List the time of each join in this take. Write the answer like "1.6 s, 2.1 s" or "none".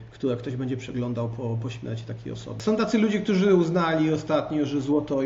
2.6 s